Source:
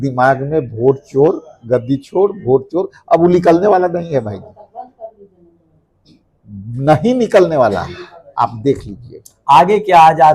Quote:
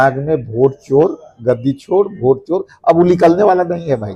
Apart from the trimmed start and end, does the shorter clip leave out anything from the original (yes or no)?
no